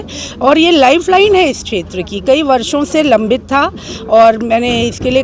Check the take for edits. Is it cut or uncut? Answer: uncut